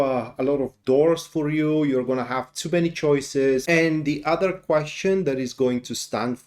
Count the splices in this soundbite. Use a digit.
1